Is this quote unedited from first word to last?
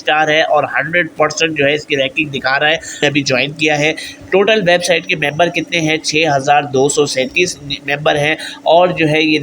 no; 1 cut; at 3.0 s

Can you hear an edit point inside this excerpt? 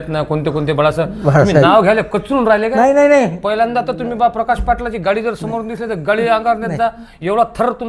no; 0 cuts

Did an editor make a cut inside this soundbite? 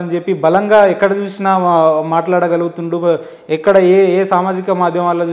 no; 0 cuts

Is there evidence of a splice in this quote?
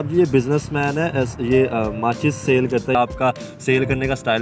yes; 1 cut; at 2.9 s

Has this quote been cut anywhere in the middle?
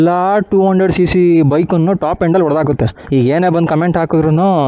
yes; 1 cut; at 3.0 s

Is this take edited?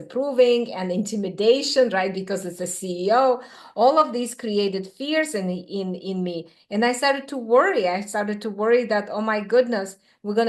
no; 0 cuts

